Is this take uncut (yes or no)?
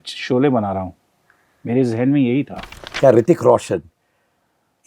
no